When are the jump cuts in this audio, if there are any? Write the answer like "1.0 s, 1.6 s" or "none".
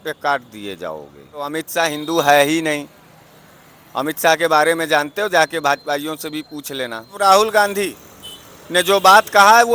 1.6 s, 7.1 s